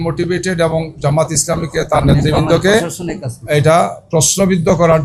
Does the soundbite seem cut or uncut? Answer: uncut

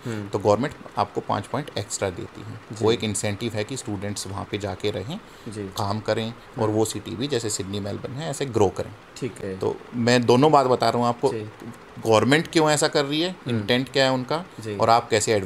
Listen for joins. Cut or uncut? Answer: uncut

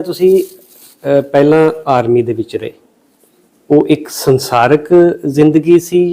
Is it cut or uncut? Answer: uncut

